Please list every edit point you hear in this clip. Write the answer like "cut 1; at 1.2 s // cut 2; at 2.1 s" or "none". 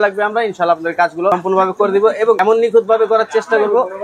cut 1; at 1.3 s // cut 2; at 2.4 s